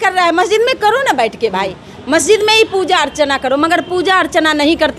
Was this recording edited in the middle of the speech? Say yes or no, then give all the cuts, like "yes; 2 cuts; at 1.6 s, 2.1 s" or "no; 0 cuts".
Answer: no; 0 cuts